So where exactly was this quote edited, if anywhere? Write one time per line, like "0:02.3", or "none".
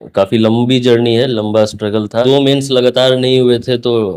0:02.2